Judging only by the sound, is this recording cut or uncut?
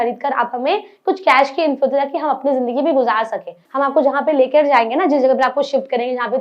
cut